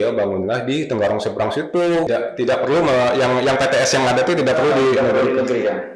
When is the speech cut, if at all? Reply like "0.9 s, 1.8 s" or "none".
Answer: 2.1 s